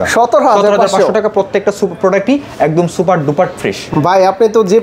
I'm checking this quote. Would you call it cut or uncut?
uncut